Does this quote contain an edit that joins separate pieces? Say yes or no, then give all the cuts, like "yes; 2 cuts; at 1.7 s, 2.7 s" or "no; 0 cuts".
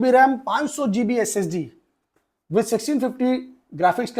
no; 0 cuts